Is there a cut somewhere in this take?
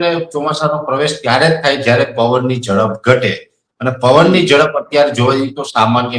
no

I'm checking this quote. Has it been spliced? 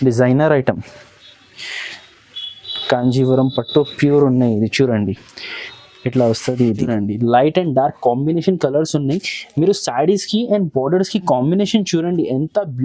yes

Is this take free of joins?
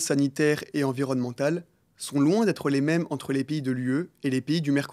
yes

